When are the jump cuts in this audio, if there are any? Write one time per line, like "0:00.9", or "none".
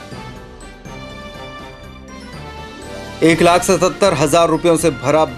0:02.7

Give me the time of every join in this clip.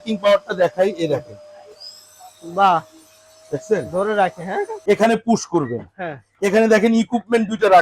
0:04.7

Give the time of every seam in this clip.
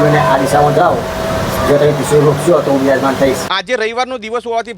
0:03.5

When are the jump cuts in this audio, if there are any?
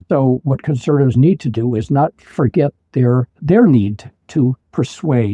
0:03.3

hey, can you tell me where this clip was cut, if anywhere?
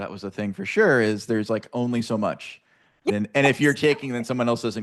0:03.1

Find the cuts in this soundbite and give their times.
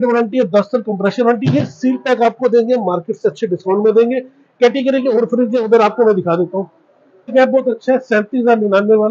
0:07.3

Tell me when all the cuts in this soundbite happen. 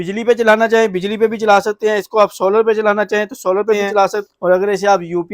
0:04.2

